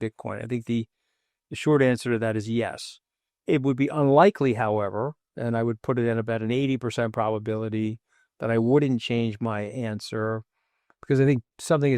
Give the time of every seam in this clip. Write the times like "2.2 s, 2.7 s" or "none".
none